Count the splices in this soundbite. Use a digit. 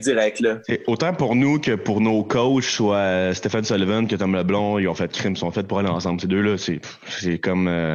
0